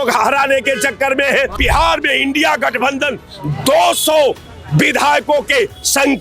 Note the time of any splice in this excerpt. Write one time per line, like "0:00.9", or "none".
0:01.6